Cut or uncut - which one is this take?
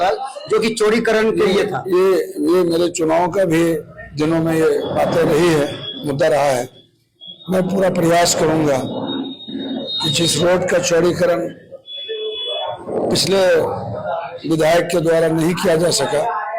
uncut